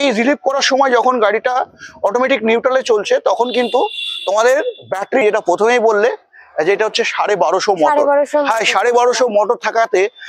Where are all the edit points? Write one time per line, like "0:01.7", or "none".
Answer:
0:05.2